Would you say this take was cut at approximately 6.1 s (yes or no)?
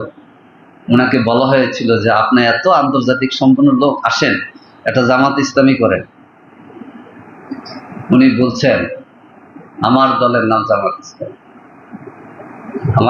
no